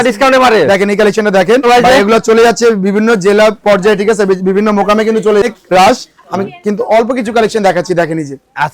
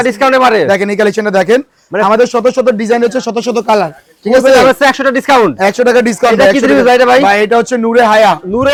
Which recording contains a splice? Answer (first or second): first